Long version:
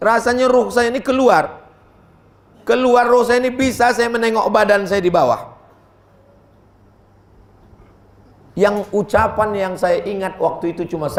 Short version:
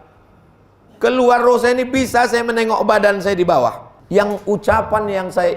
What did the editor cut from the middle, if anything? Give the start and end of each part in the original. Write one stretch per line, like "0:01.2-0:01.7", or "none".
0:05.6-0:08.4